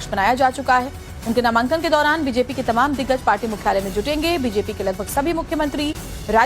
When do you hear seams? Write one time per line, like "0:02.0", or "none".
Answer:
0:03.4